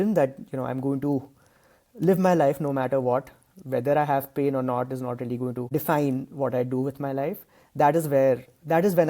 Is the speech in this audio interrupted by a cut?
yes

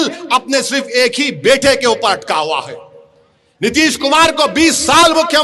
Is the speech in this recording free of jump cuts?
yes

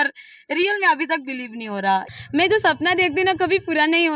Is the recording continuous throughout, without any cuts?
no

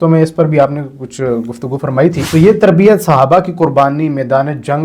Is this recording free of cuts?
no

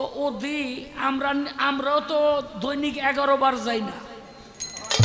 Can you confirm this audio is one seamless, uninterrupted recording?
yes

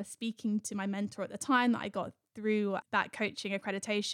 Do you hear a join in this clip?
yes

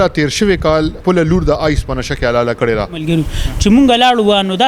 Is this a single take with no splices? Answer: no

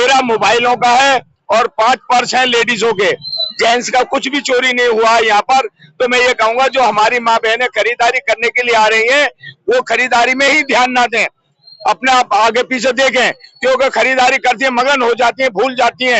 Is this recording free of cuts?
yes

